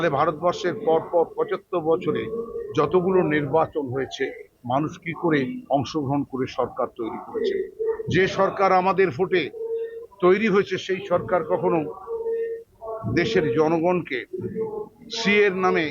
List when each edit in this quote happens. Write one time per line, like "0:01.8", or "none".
none